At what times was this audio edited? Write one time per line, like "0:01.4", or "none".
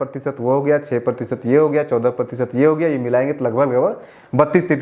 none